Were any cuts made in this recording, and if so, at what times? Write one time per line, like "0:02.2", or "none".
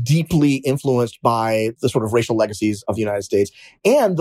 0:01.8
0:02.9